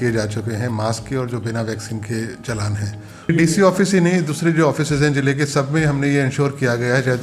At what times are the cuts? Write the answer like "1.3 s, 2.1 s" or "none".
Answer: 3.3 s